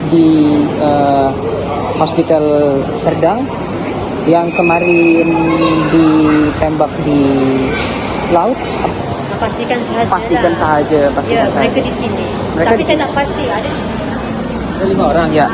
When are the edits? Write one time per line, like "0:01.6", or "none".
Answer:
0:08.9